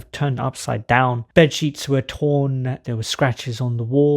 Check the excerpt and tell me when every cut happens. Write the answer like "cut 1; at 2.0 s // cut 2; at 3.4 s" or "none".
cut 1; at 1.2 s // cut 2; at 2.8 s